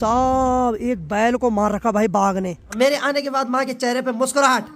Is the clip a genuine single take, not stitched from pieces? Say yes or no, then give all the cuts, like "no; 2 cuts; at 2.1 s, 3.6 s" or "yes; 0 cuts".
no; 1 cut; at 2.6 s